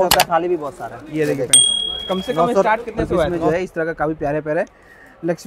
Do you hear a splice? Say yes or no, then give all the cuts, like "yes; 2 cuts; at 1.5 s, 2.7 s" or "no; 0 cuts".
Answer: yes; 1 cut; at 3.4 s